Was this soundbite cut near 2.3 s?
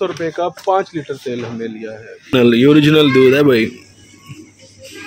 yes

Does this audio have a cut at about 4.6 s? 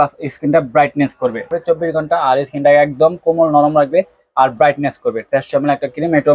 no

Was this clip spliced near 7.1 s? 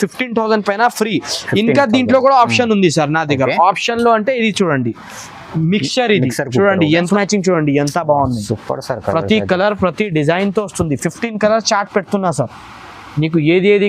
yes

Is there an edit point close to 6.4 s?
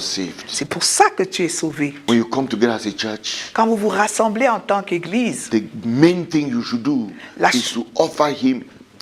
no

